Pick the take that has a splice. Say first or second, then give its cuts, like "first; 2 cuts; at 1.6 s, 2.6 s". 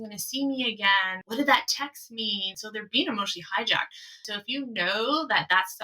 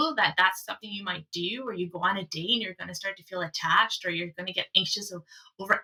first; 3 cuts; at 1.2 s, 2.5 s, 4.2 s